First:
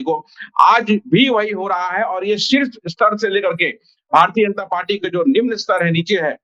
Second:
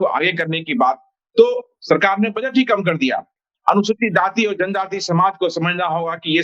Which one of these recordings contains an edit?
second; 1 cut; at 3.3 s

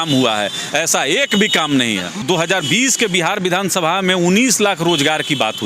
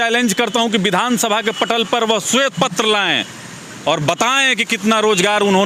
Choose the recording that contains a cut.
first; 1 cut; at 2.2 s

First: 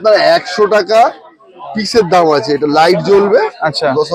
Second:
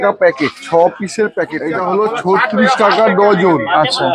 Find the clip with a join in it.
second; 1 cut; at 1.6 s

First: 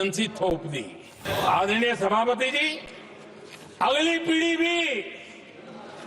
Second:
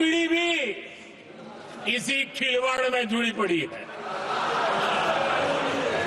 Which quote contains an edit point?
first; 1 cut; at 1.2 s

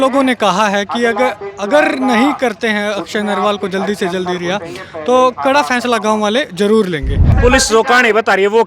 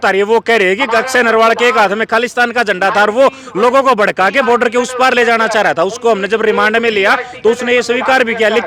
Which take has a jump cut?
first; 1 cut; at 7.3 s

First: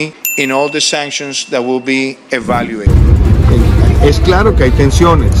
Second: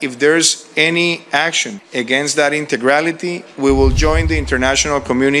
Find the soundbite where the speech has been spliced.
first; 1 cut; at 2.8 s

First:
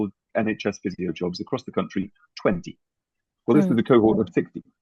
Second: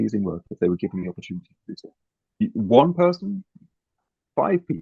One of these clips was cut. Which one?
second; 1 cut; at 2.4 s

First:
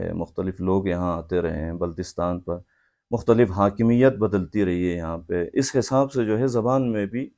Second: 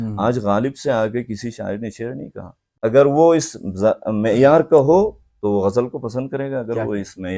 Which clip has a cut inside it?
second; 1 cut; at 2.8 s

